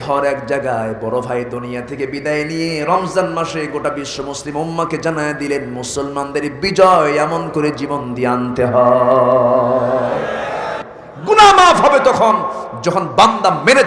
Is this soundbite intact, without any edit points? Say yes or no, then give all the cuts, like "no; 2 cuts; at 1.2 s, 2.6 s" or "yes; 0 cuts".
no; 1 cut; at 10.9 s